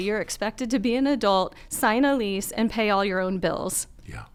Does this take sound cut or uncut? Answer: uncut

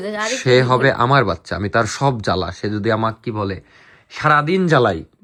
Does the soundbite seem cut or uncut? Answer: uncut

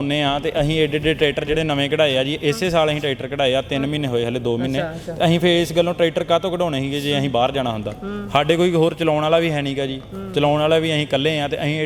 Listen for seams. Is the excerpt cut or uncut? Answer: uncut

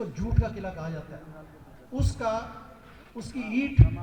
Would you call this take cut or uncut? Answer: uncut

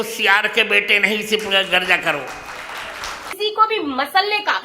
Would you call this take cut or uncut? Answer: cut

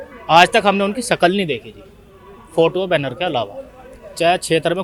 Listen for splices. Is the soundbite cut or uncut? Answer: uncut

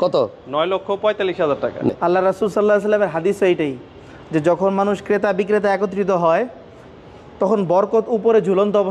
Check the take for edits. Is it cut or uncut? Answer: cut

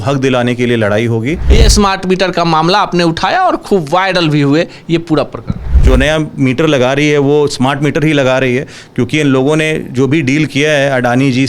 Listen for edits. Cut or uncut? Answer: cut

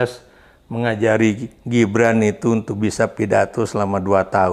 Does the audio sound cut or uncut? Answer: uncut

